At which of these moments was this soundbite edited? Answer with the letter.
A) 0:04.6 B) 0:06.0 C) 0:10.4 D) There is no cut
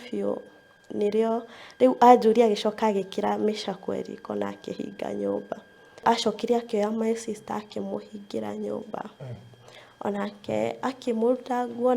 B